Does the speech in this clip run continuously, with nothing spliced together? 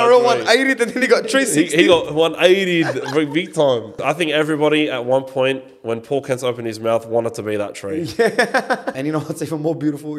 no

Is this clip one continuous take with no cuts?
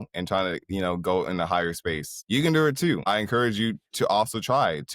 no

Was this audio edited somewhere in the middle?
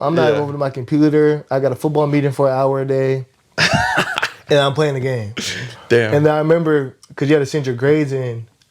no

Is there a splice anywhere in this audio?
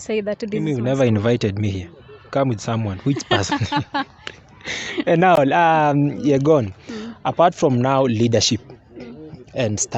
no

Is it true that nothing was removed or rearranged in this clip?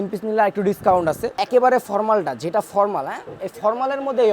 no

